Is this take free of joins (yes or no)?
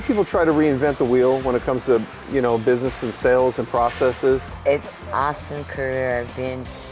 no